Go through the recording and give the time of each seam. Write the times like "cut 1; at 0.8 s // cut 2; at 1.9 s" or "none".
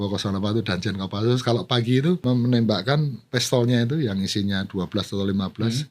cut 1; at 2.2 s // cut 2; at 3.2 s